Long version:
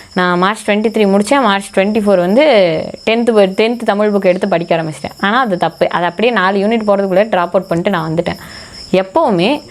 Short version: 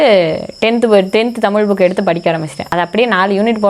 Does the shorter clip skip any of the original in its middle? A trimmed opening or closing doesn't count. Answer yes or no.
yes